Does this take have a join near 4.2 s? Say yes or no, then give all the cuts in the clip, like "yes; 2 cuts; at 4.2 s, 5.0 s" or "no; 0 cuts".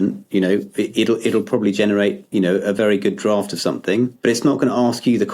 yes; 1 cut; at 4.2 s